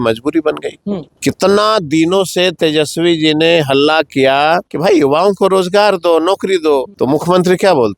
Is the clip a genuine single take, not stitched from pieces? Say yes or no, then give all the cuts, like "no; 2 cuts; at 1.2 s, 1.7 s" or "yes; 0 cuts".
no; 3 cuts; at 1.1 s, 4.7 s, 6.9 s